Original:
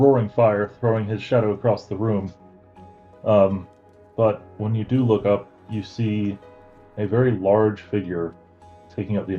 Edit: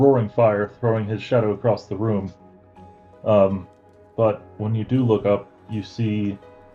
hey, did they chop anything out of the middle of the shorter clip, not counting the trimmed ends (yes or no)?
no